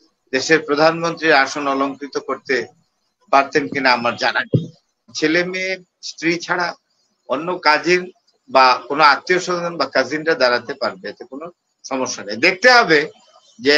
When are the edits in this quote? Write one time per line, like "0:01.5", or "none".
0:05.1